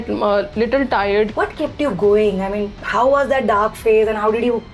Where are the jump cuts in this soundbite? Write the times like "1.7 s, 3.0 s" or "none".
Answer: 1.3 s